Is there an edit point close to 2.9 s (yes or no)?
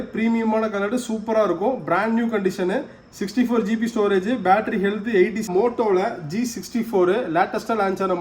no